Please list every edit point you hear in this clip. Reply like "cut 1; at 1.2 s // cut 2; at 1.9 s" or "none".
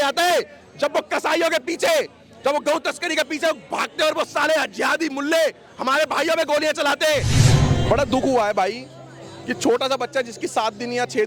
cut 1; at 7.4 s